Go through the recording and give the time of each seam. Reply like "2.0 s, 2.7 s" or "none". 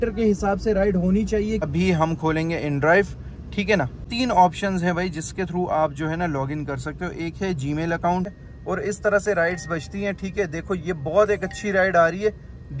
1.6 s, 8.4 s